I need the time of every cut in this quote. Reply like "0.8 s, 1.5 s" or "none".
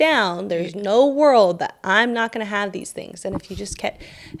none